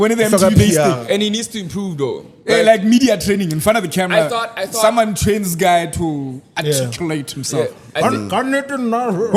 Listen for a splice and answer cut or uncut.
uncut